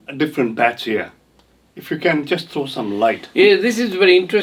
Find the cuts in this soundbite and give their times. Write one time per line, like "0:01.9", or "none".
none